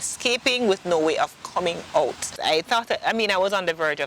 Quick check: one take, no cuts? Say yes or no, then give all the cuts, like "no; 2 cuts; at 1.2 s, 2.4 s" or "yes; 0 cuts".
no; 1 cut; at 2.3 s